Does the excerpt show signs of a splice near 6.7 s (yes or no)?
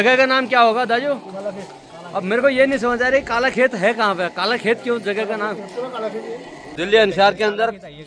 yes